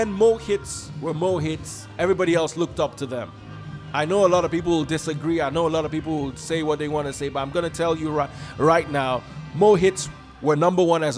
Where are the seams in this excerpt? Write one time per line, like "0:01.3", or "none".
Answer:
none